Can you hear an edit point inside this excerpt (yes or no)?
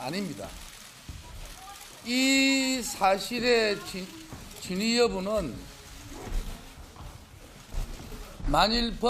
yes